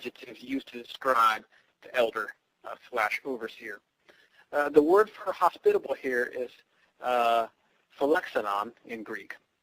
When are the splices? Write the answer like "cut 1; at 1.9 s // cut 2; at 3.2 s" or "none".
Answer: none